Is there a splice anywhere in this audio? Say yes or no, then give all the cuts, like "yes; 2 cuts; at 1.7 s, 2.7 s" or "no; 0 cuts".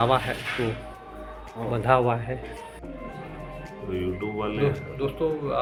no; 0 cuts